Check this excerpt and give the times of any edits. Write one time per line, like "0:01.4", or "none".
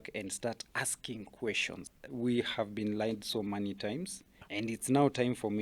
0:01.8
0:04.4